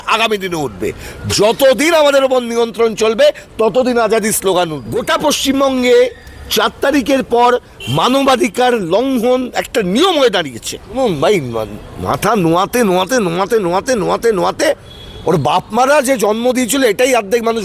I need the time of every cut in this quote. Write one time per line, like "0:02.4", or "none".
0:04.9
0:10.9